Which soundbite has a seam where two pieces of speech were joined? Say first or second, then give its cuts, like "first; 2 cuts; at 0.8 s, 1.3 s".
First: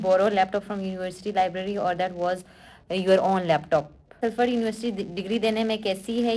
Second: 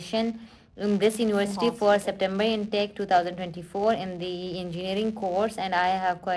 first; 1 cut; at 4.2 s